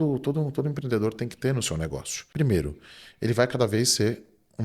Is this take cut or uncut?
cut